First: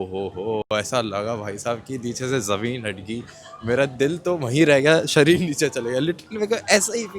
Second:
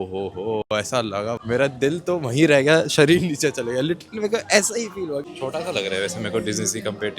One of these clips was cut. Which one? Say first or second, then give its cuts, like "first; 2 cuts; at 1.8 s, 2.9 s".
second; 2 cuts; at 1.4 s, 5.3 s